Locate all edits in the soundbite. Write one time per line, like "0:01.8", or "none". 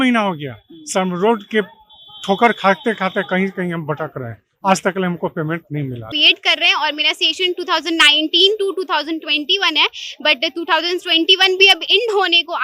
0:06.1